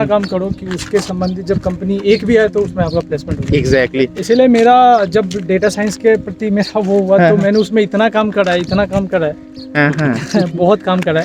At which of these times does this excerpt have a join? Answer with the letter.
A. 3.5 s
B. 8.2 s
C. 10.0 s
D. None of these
D